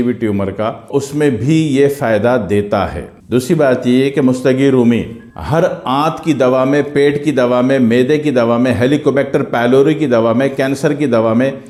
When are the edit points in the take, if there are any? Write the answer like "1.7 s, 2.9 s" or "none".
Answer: none